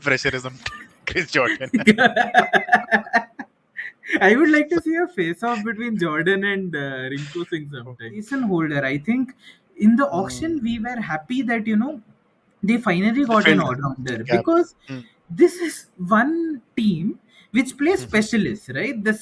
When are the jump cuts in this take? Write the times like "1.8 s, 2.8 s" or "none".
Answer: 8.3 s